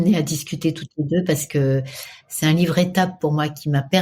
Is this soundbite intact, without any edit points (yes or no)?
no